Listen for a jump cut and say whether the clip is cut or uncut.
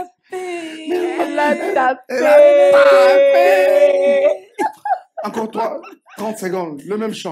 uncut